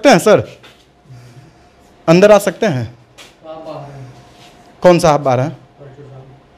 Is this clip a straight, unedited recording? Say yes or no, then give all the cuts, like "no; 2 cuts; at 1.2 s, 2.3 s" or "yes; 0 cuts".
yes; 0 cuts